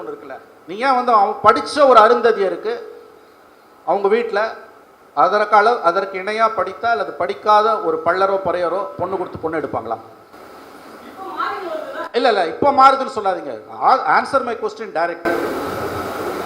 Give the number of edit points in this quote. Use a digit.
0